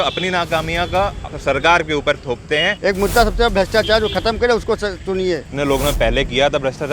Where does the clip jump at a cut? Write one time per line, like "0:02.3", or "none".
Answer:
0:02.7
0:05.5